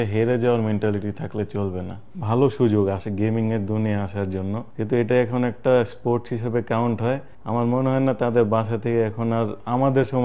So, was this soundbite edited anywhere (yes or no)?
yes